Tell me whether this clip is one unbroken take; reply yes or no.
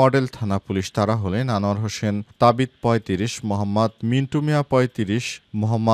yes